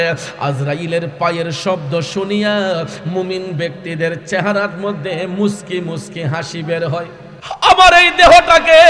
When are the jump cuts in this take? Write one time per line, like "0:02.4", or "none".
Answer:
0:07.3

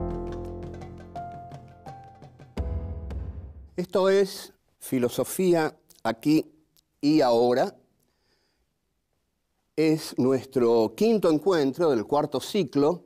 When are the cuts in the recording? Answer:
0:10.5

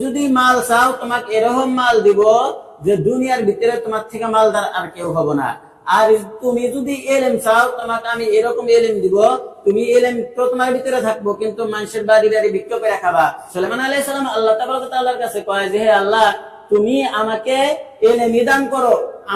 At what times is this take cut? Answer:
0:13.4

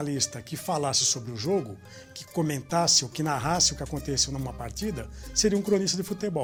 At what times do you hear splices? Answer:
none

